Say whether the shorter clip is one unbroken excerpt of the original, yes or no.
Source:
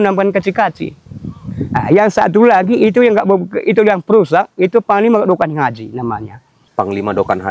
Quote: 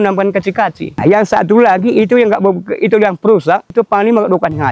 no